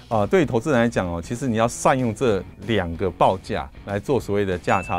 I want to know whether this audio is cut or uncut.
cut